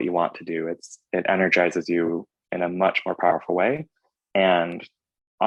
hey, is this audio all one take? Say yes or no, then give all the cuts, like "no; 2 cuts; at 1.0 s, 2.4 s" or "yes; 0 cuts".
yes; 0 cuts